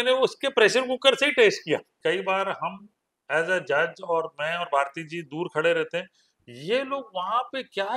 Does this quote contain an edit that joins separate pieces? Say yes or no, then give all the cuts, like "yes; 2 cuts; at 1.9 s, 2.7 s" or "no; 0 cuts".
yes; 1 cut; at 1.9 s